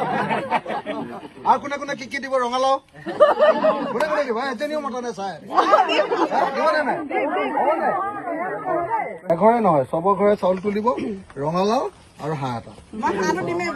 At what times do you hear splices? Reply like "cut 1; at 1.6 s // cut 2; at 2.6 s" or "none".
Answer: cut 1; at 9.2 s